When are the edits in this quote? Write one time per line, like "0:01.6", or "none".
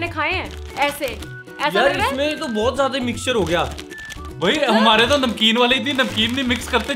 none